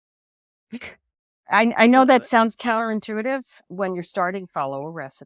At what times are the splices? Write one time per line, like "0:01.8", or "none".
0:03.6